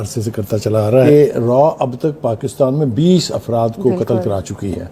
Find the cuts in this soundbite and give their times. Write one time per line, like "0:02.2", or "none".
0:01.1